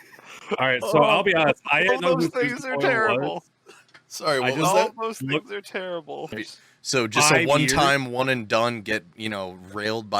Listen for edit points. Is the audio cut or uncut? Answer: cut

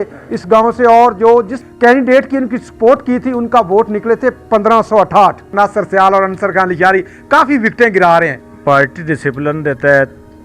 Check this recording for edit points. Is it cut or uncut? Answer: cut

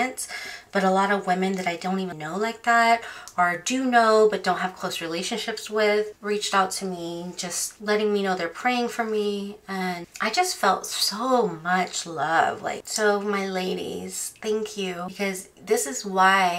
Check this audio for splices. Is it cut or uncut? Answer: uncut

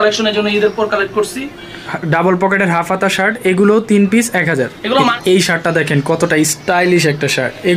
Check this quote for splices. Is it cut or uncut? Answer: cut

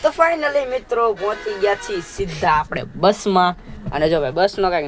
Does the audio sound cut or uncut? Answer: uncut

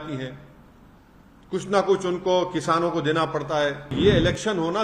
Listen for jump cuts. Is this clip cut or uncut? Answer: cut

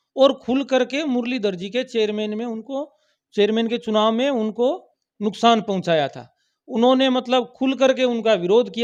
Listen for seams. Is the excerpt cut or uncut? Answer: uncut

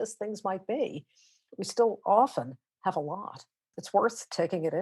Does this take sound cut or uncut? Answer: cut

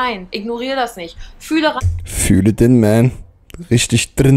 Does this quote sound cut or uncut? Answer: uncut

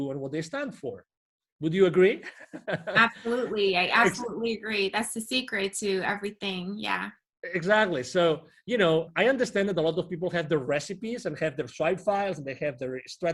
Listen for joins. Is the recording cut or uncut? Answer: uncut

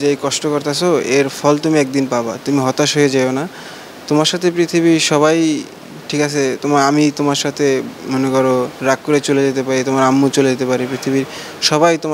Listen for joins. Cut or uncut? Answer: uncut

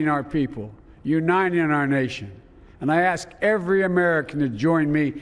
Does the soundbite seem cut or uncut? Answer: uncut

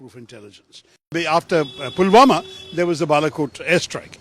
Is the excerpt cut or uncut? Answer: cut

